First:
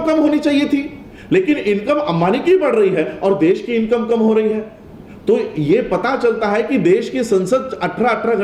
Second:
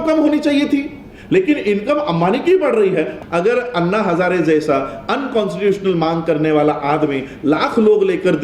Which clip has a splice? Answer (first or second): second